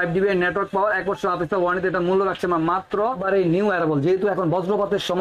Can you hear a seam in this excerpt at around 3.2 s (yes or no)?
yes